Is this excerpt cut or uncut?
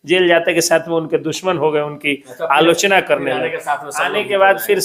uncut